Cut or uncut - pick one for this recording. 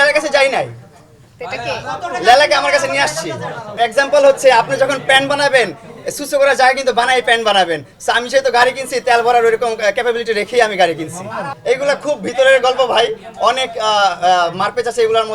cut